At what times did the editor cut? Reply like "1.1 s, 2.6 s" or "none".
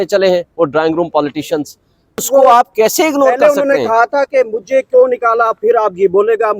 2.2 s